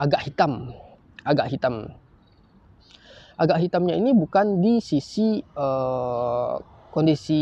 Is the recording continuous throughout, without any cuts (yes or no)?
yes